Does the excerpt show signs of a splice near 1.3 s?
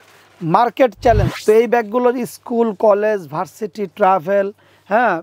yes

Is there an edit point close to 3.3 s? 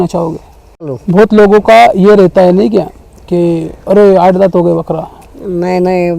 no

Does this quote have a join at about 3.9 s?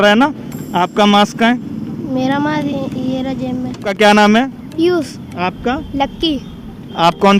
yes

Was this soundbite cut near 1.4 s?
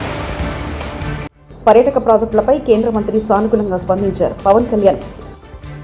yes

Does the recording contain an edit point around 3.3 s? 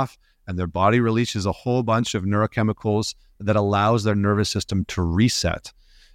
yes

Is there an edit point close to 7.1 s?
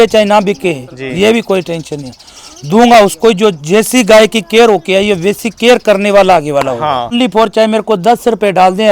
yes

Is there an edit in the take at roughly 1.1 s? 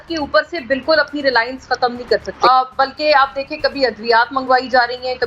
no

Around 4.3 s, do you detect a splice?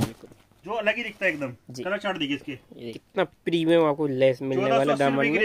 no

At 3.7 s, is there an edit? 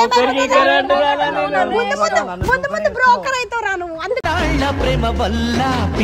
no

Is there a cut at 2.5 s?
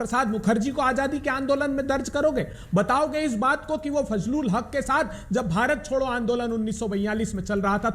no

